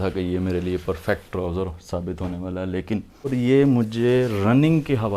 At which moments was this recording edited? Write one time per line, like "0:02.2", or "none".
0:03.1